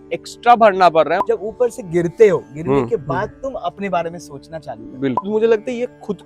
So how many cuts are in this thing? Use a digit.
2